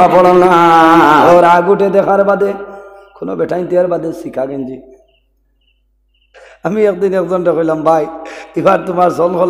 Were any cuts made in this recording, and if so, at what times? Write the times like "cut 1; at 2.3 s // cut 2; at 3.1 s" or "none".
cut 1; at 1.3 s